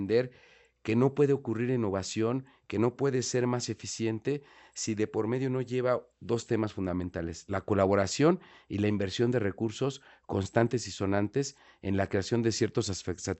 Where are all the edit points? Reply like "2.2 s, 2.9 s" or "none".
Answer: none